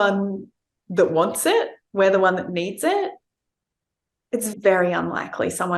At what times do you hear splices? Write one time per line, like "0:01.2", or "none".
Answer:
none